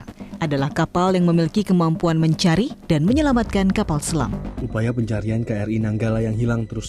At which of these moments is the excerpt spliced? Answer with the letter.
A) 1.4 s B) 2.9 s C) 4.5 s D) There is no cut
C